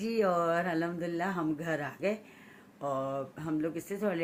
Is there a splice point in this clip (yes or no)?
no